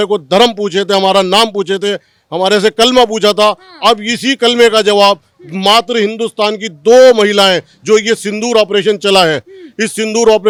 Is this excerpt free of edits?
yes; 0 cuts

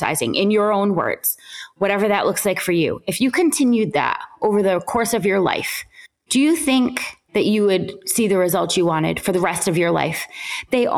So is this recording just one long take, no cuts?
yes; 0 cuts

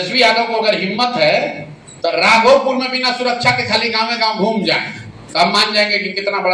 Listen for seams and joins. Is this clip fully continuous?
yes; 0 cuts

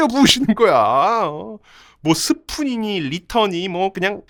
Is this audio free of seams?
yes; 0 cuts

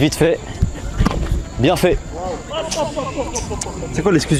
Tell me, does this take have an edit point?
no; 0 cuts

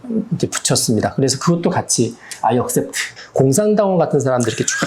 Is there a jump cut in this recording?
yes; 1 cut; at 3.1 s

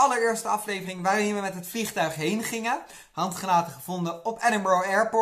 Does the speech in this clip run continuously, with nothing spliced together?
yes; 0 cuts

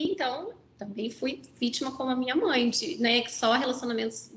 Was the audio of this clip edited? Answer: no; 0 cuts

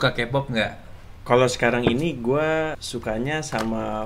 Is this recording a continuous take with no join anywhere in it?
no; 2 cuts; at 0.8 s, 2.8 s

